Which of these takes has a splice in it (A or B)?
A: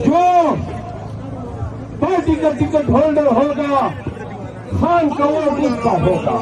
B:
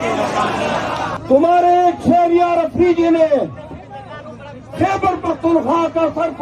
B